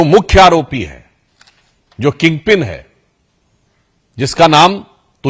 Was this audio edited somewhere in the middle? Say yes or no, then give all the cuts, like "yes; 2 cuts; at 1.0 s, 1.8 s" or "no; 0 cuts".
no; 0 cuts